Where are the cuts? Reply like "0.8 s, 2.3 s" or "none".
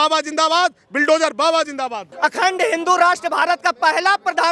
2.1 s